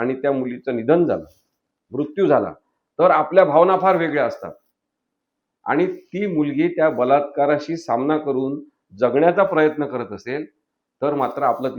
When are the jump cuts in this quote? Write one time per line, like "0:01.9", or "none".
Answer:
none

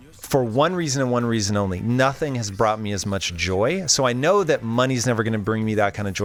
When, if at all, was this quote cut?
none

